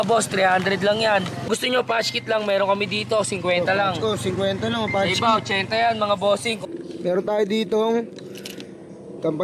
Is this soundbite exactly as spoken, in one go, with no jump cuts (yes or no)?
no